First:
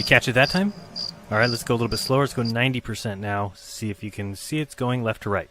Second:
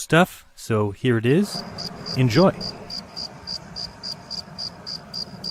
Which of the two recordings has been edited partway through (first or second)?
first